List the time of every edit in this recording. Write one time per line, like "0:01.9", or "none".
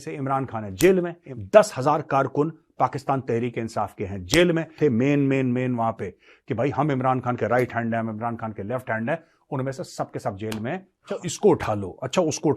0:01.2
0:04.7
0:11.0